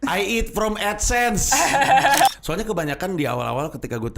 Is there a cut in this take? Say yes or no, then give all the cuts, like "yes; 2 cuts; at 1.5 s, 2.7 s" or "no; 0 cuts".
yes; 1 cut; at 2.3 s